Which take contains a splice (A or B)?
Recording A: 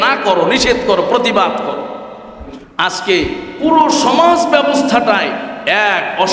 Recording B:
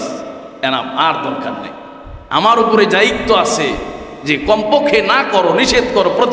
A